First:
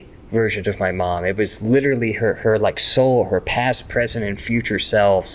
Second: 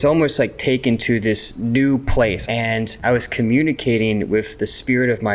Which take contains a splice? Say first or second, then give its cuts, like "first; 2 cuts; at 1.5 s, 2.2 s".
second; 2 cuts; at 1.5 s, 2.4 s